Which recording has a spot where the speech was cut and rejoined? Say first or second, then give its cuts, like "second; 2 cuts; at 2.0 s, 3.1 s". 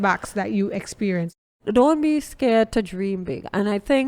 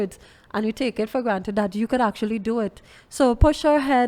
first; 1 cut; at 1.5 s